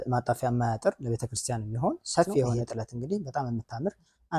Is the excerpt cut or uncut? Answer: cut